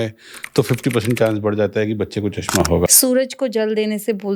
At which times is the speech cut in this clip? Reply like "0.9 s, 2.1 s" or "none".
2.9 s